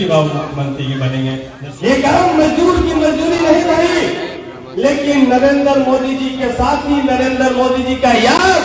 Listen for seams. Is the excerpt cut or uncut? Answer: cut